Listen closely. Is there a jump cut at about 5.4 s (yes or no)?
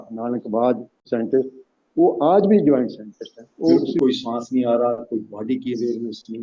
no